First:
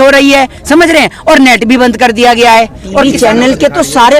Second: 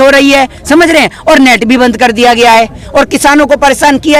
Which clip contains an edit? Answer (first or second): first